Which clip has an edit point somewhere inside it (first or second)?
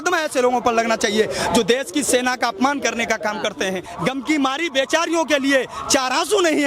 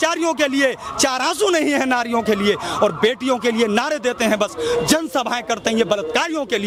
first